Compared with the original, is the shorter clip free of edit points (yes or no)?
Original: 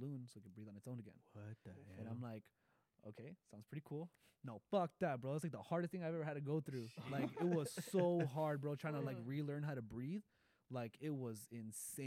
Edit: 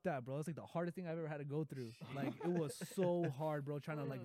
yes